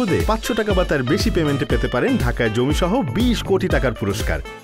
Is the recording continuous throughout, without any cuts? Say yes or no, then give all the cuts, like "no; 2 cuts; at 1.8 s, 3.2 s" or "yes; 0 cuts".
yes; 0 cuts